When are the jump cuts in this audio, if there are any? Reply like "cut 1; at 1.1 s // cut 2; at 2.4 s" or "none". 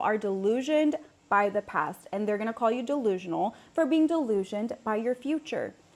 none